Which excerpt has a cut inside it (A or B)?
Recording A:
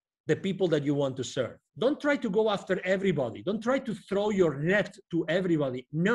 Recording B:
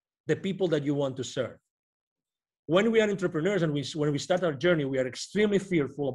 A